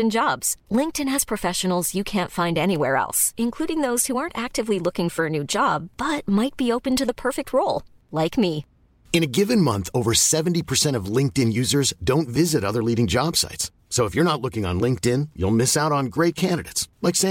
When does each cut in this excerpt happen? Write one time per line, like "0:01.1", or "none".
none